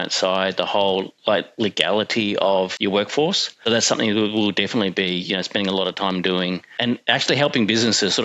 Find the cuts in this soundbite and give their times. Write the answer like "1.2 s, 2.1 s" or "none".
2.7 s, 3.6 s, 6.8 s